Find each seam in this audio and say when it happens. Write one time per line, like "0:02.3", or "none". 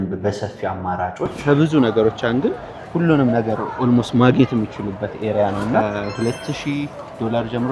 0:01.4
0:05.8